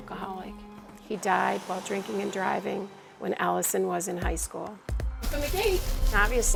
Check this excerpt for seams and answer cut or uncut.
uncut